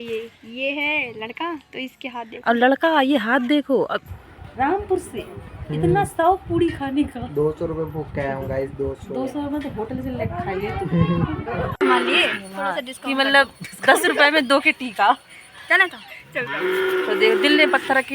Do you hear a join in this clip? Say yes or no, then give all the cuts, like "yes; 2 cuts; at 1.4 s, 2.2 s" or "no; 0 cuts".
yes; 2 cuts; at 4.0 s, 11.8 s